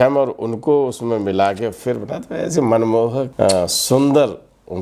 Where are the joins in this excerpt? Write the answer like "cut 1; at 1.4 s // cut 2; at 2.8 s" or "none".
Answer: cut 1; at 3.3 s